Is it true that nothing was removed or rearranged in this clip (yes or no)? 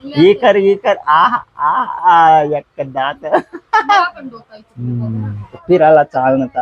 no